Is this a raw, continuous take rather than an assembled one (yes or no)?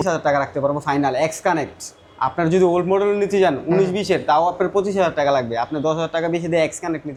yes